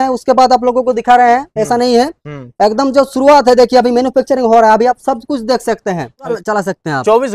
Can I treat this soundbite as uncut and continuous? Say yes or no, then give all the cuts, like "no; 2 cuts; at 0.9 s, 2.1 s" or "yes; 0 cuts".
no; 1 cut; at 6.3 s